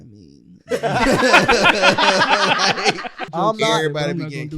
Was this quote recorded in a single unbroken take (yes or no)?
no